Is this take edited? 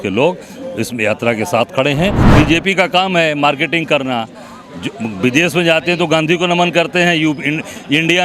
yes; 1 cut; at 2.2 s

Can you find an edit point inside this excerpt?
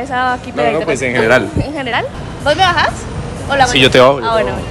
yes; 1 cut; at 2.0 s

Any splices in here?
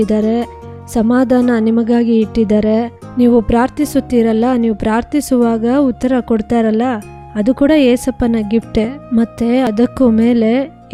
no; 0 cuts

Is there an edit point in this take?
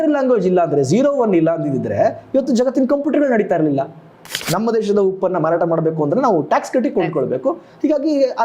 yes; 1 cut; at 4.2 s

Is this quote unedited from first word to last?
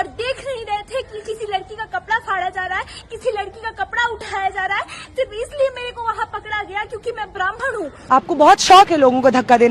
no; 1 cut; at 7.9 s

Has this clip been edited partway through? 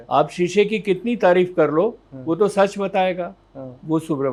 no; 0 cuts

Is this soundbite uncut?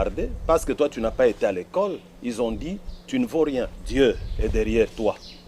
no; 1 cut; at 3.8 s

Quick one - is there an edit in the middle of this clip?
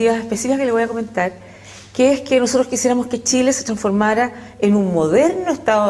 yes; 1 cut; at 4.0 s

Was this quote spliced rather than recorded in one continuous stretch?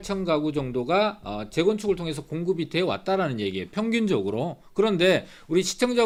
no; 0 cuts

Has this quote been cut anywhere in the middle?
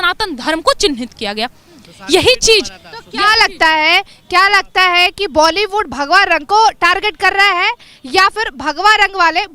no; 0 cuts

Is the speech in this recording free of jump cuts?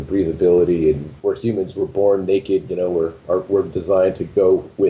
no; 1 cut; at 1.1 s

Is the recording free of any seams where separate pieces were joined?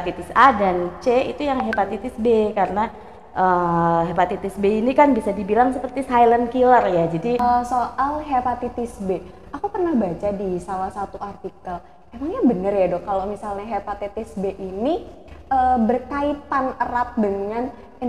no; 1 cut; at 7.4 s

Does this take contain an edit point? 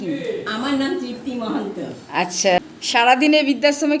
yes; 1 cut; at 2.6 s

